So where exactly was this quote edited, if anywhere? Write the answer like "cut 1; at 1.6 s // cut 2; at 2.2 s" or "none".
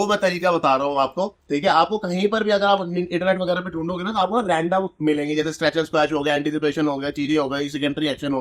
none